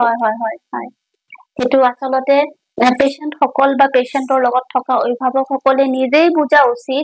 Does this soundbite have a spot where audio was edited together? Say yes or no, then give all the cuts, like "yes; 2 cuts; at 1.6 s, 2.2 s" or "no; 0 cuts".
no; 0 cuts